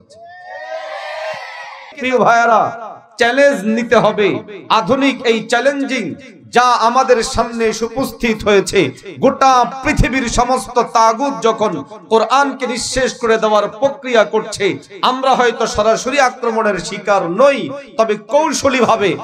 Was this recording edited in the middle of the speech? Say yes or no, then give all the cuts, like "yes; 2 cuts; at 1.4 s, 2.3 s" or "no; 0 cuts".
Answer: yes; 1 cut; at 1.9 s